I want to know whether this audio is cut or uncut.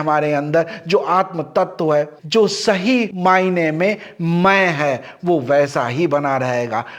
uncut